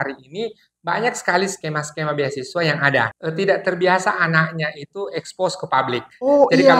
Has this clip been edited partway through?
yes; 1 cut; at 3.1 s

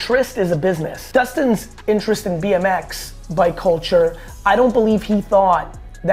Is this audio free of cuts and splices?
yes; 0 cuts

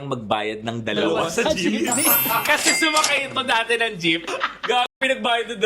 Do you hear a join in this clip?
yes; 1 cut; at 4.3 s

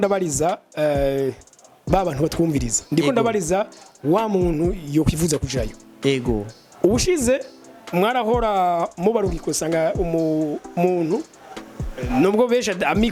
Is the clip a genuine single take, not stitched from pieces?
yes; 0 cuts

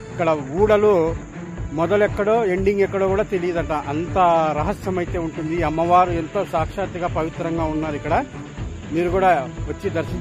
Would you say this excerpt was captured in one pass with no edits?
yes; 0 cuts

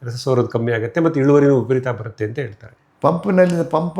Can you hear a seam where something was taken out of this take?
yes; 1 cut; at 2.8 s

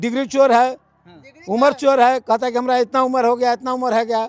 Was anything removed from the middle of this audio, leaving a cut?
no; 0 cuts

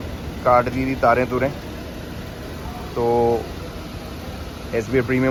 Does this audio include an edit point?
no; 0 cuts

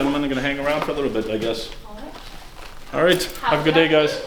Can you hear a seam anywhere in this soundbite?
no; 0 cuts

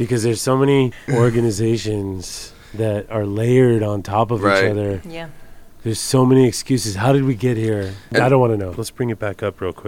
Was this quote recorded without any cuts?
no; 3 cuts; at 1.1 s, 8.0 s, 8.8 s

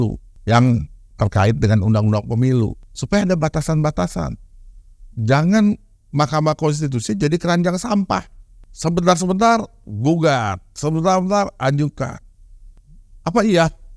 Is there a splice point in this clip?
yes; 1 cut; at 12.5 s

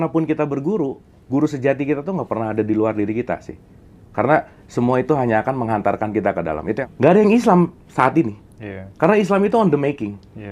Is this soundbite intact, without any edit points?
no; 1 cut; at 6.8 s

